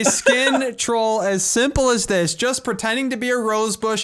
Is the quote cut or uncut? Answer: uncut